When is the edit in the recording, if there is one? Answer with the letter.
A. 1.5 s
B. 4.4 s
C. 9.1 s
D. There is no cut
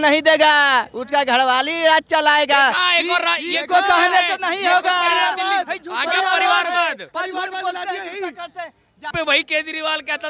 C